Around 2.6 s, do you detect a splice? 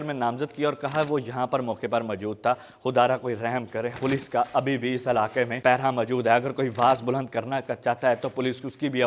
no; 2 cuts; at 4.0 s, 5.5 s

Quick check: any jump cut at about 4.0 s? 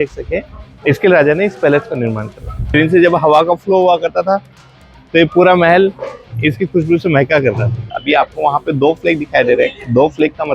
no; 2 cuts; at 2.7 s, 7.8 s

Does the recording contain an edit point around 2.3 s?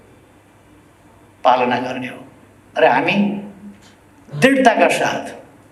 no; 0 cuts

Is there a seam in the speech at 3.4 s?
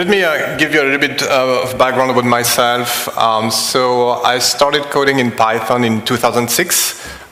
no; 0 cuts

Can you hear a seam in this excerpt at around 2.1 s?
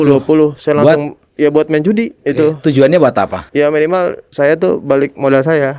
yes; 3 cuts; at 2.1 s, 3.4 s, 4.2 s

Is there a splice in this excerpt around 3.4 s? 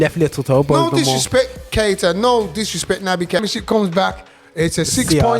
yes; 1 cut; at 3.4 s

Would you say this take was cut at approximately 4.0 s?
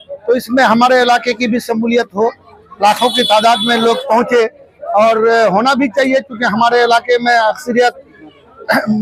no; 0 cuts

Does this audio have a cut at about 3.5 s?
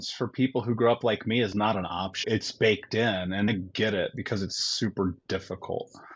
yes; 2 cuts; at 2.2 s, 3.5 s

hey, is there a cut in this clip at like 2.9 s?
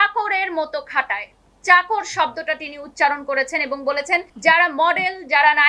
no; 1 cut; at 4.3 s

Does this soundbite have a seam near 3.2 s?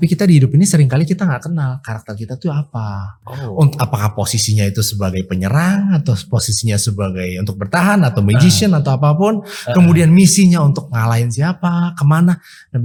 no; 0 cuts

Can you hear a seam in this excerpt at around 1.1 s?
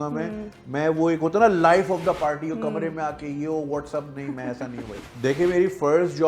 no; 1 cut; at 5.1 s

